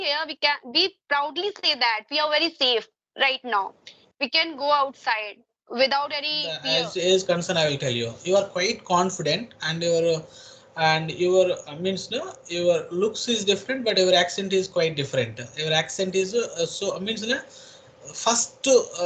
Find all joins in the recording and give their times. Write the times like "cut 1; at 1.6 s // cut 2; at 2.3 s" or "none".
cut 1; at 6.6 s